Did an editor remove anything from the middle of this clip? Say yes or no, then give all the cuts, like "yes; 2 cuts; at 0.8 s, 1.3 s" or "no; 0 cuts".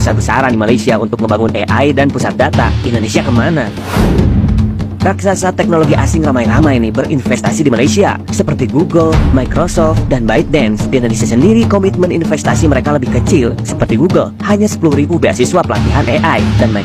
no; 0 cuts